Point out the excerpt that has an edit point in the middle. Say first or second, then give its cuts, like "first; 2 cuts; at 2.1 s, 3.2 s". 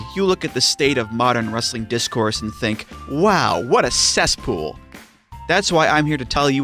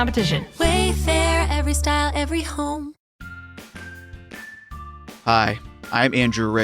second; 1 cut; at 3.0 s